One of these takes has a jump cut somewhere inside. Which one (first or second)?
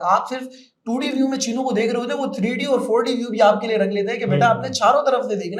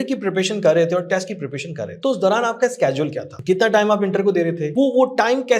second